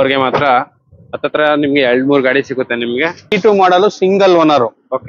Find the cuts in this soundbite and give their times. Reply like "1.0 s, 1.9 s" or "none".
3.3 s